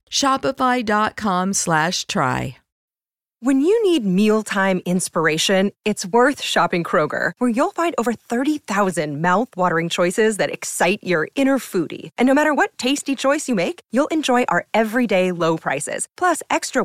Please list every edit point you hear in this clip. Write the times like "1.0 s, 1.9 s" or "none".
2.6 s